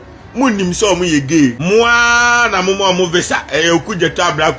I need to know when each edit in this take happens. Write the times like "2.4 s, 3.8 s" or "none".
1.6 s